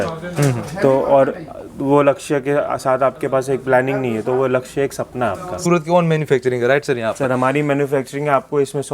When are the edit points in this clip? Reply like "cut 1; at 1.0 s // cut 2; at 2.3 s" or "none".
cut 1; at 5.5 s